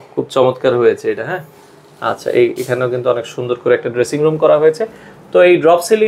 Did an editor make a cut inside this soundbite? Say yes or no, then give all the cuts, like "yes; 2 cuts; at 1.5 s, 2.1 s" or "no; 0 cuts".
no; 0 cuts